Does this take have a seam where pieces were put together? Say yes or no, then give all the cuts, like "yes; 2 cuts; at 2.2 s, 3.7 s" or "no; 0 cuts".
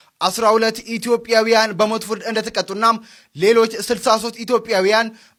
no; 0 cuts